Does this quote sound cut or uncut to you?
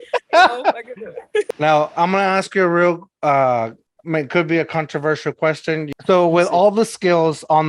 cut